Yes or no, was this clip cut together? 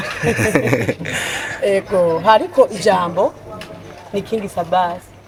no